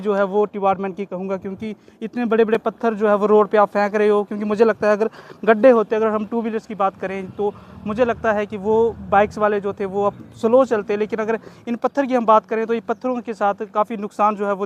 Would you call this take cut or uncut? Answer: uncut